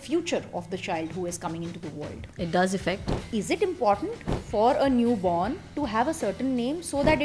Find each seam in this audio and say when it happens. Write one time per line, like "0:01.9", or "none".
0:02.2
0:03.2

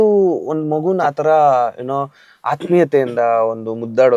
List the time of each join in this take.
none

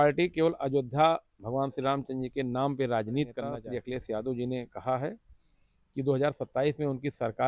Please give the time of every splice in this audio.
0:03.6

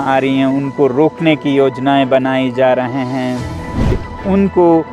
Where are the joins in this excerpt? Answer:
0:03.9

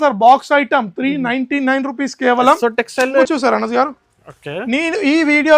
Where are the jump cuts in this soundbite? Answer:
0:03.2

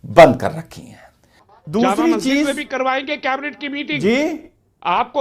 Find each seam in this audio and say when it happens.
none

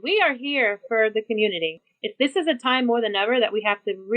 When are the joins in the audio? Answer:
0:01.8

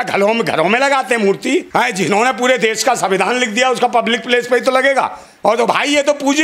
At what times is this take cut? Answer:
0:01.7
0:05.2

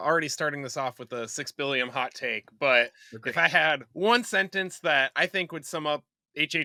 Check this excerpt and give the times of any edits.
none

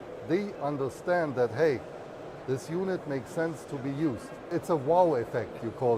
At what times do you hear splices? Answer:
0:04.5

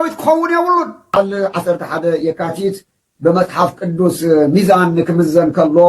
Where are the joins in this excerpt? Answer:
0:01.1

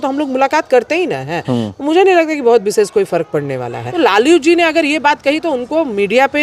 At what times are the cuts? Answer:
0:03.8

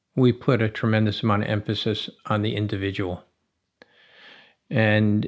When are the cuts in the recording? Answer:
none

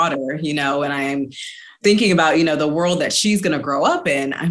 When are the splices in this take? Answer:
0:01.7

